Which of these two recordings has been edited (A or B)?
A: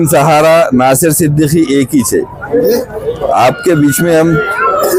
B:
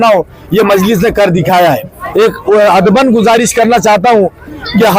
B